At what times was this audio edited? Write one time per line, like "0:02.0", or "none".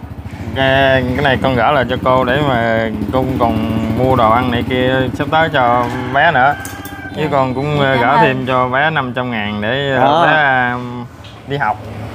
none